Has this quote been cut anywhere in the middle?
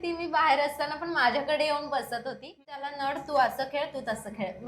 yes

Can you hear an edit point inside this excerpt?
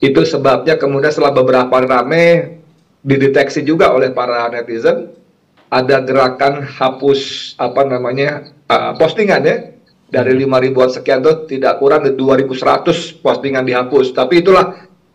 no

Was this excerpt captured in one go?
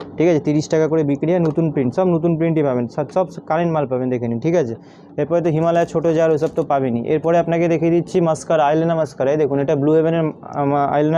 yes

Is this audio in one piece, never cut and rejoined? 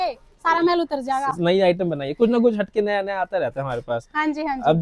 yes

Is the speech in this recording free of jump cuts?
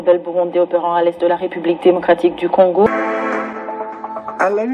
no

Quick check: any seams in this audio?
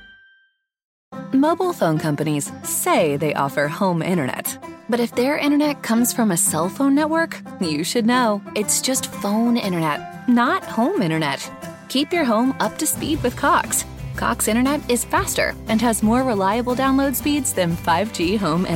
yes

